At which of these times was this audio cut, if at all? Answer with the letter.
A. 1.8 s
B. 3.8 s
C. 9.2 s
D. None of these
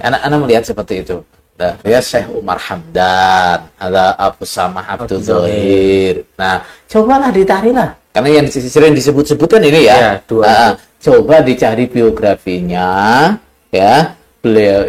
A